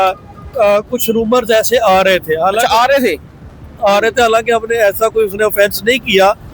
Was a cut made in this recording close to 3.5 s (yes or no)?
no